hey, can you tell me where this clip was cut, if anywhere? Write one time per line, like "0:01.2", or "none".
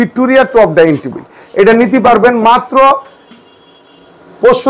none